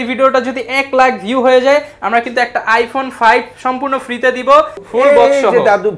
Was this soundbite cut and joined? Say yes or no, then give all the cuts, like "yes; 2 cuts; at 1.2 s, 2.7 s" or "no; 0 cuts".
yes; 1 cut; at 4.8 s